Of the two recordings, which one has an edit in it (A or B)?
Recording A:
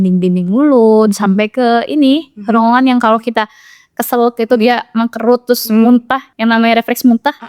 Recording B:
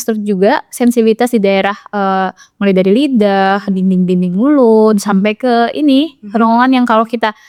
A